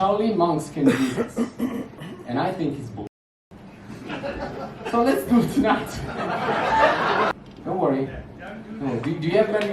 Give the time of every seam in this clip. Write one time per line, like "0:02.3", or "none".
0:07.3